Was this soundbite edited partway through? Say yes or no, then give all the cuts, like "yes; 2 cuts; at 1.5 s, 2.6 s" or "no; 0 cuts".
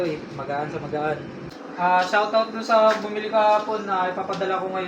yes; 1 cut; at 1.6 s